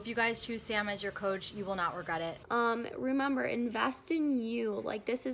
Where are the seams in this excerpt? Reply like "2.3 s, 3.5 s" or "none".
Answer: 2.3 s